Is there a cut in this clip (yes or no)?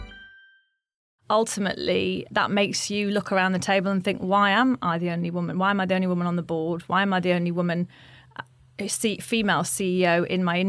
yes